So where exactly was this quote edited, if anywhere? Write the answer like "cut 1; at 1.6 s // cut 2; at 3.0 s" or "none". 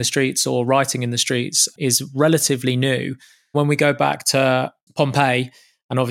cut 1; at 1.7 s // cut 2; at 3.5 s // cut 3; at 4.8 s